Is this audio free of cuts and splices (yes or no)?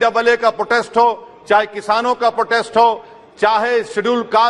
yes